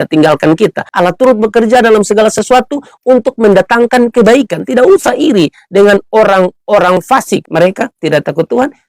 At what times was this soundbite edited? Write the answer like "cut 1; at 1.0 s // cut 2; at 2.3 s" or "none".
cut 1; at 7.5 s